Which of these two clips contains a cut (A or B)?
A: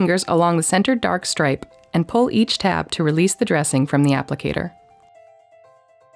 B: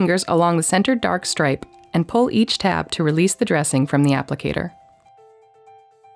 B